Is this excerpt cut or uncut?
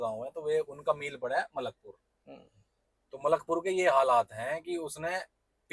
uncut